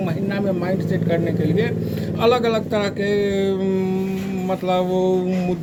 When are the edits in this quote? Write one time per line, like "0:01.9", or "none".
none